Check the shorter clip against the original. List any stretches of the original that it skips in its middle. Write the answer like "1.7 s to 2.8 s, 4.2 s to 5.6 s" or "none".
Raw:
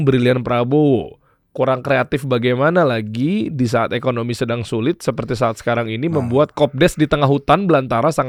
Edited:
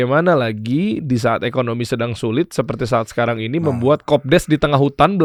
none

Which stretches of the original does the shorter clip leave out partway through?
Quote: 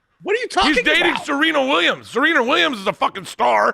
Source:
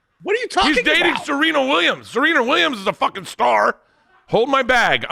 none

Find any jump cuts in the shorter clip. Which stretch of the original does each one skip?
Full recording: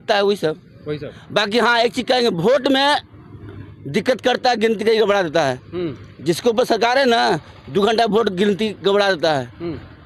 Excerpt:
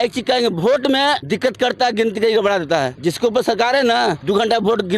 3.0 s to 3.9 s, 5.6 s to 6.2 s, 7.4 s to 7.7 s

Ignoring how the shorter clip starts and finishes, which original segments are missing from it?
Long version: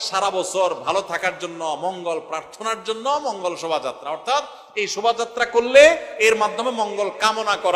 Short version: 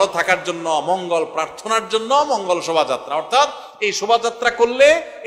none

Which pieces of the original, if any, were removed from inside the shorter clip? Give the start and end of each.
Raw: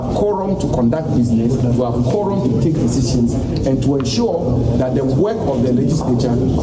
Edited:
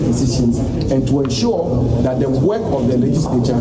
none

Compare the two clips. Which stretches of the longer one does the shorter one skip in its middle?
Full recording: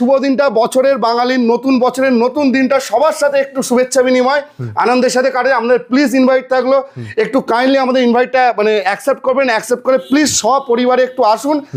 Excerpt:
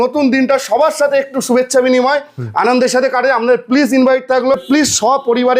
6.8 s to 10.0 s

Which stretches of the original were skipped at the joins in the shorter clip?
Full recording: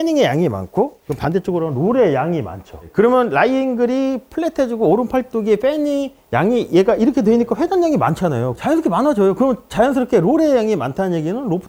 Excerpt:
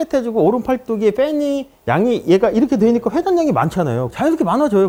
none

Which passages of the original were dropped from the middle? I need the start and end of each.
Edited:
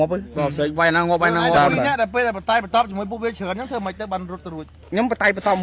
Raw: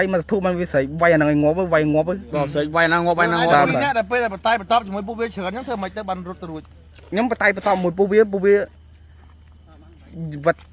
6.7 s to 6.9 s

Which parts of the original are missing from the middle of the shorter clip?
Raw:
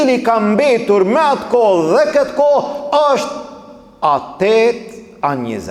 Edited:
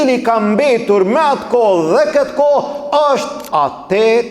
3.4 s to 3.9 s

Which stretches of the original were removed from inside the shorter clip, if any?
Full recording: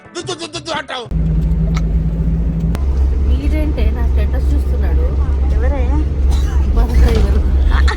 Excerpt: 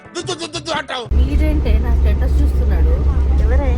1.1 s to 3.2 s

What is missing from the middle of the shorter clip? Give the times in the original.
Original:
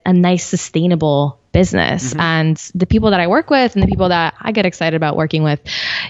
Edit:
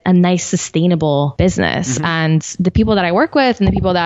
1.3 s to 1.5 s

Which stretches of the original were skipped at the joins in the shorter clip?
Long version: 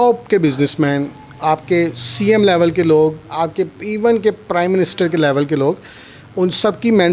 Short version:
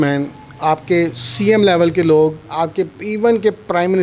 none

